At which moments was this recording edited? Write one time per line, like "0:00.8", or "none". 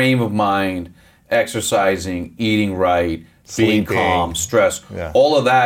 none